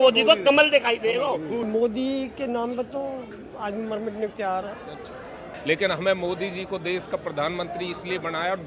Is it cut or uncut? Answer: cut